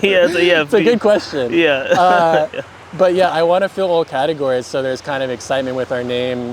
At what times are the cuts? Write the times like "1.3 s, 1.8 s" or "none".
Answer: none